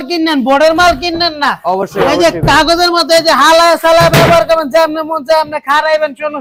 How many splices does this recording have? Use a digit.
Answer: 0